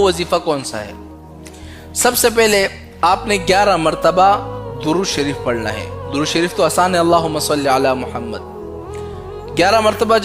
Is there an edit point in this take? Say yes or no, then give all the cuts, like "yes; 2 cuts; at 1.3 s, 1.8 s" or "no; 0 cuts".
yes; 1 cut; at 7.0 s